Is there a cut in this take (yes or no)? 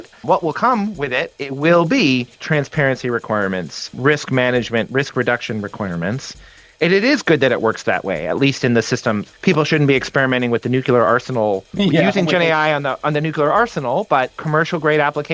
yes